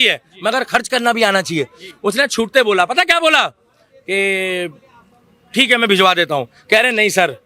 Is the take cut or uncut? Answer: uncut